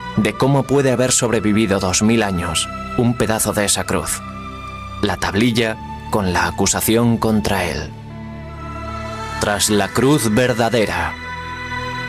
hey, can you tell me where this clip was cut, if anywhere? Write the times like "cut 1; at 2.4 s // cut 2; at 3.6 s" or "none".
cut 1; at 7.6 s